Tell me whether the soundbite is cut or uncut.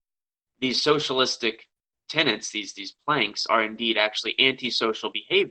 uncut